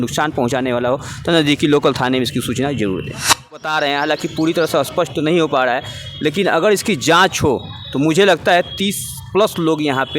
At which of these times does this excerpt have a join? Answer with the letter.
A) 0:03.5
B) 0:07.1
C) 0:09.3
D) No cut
A